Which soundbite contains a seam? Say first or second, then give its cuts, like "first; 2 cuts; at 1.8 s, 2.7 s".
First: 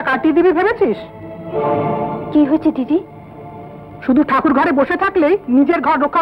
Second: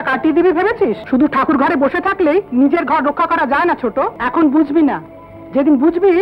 second; 2 cuts; at 1.0 s, 4.2 s